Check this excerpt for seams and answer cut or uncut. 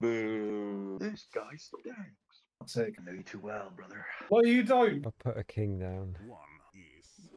cut